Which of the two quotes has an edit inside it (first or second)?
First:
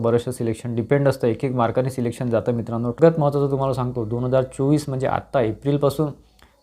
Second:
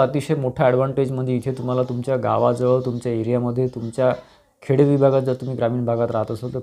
first